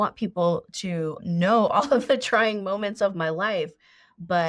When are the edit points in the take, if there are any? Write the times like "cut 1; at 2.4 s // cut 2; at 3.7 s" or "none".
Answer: cut 1; at 1.2 s